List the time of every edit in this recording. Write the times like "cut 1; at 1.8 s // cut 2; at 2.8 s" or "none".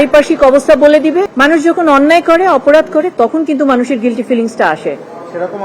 cut 1; at 1.3 s